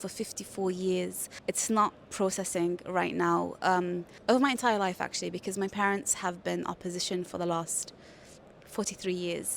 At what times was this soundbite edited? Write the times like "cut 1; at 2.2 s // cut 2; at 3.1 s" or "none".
cut 1; at 1.3 s // cut 2; at 4.1 s